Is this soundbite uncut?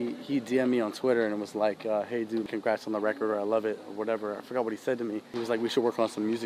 no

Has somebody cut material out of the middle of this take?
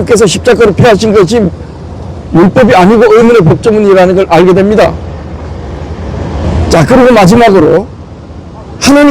yes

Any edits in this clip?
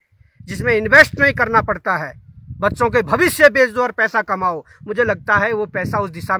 no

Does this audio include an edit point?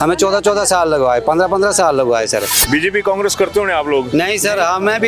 no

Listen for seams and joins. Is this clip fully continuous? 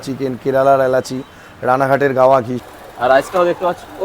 no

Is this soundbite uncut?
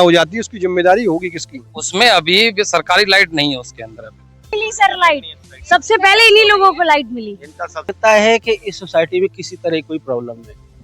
no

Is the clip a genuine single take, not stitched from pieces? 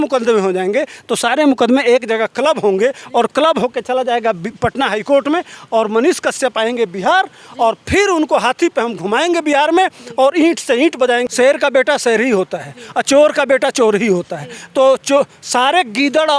no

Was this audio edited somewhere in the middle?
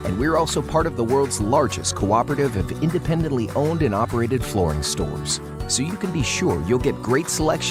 no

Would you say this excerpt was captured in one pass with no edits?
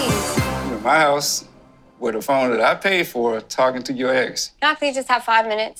yes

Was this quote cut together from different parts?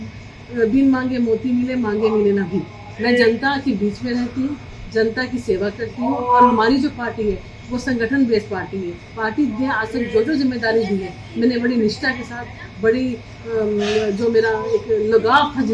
no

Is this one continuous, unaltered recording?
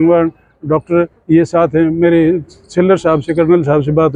yes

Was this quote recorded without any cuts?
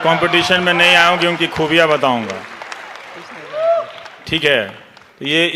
yes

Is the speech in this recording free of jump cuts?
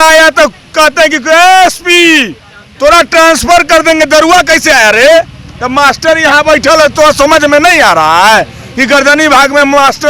yes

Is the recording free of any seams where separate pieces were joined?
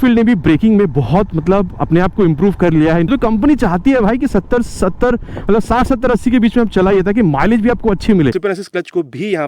no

